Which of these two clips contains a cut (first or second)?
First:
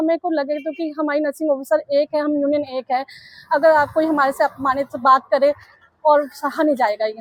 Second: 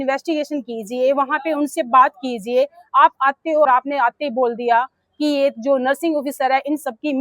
second